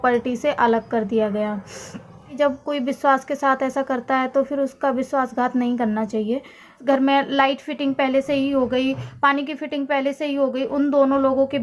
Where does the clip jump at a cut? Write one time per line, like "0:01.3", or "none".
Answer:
0:02.3
0:06.8